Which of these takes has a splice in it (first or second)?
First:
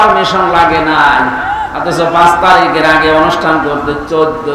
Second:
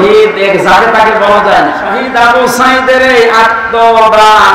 second